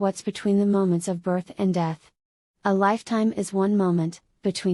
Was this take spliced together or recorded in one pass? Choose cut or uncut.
uncut